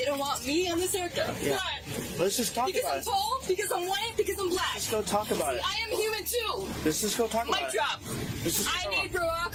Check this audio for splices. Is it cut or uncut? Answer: uncut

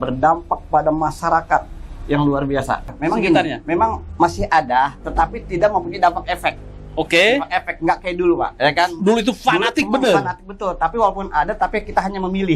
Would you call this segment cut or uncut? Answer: cut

